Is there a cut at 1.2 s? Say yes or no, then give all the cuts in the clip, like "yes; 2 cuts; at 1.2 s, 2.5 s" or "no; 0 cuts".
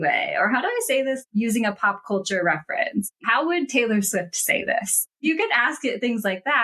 yes; 3 cuts; at 1.2 s, 3.1 s, 5.1 s